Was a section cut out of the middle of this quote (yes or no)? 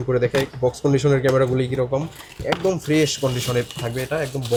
no